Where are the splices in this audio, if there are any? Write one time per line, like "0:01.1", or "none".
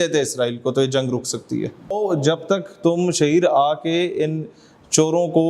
0:01.9